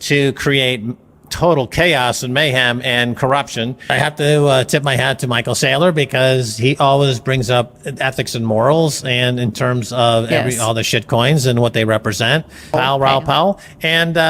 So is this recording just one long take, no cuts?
no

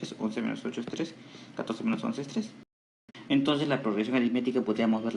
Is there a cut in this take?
yes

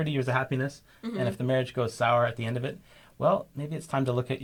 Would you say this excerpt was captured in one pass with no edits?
yes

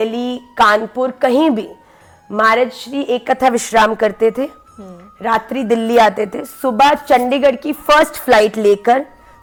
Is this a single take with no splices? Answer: yes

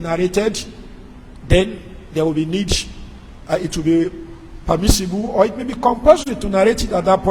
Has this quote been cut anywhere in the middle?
no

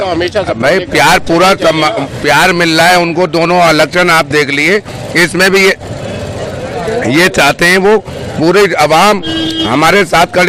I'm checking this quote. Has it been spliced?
no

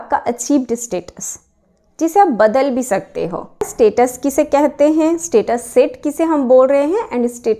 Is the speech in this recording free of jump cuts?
no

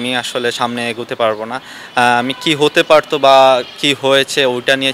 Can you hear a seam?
no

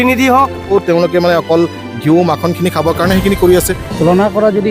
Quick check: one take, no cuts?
no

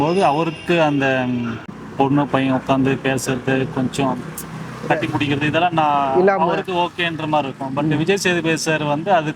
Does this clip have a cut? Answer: yes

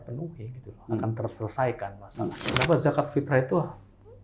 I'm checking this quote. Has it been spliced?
yes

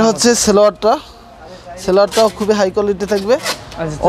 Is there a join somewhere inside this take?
no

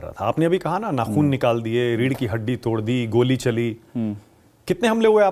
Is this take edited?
no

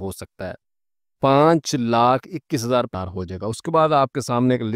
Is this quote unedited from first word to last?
no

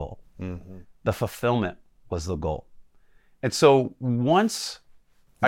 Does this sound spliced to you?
no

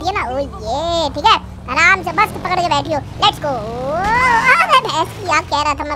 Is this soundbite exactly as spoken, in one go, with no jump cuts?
yes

